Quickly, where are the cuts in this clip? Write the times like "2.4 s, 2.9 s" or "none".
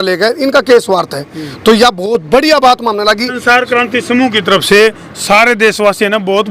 3.4 s